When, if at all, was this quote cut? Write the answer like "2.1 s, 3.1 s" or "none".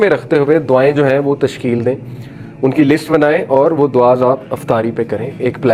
none